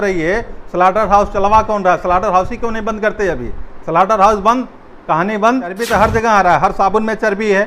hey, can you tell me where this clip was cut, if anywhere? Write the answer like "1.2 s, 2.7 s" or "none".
5.8 s